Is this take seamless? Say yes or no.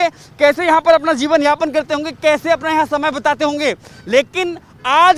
yes